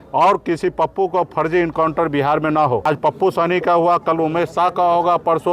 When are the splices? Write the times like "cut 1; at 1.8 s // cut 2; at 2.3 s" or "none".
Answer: cut 1; at 2.9 s